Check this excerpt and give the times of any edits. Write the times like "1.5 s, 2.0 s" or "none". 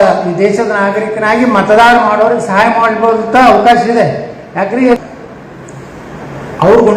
5.0 s